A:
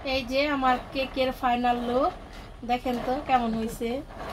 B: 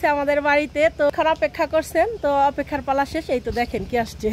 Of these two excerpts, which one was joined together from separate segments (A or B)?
B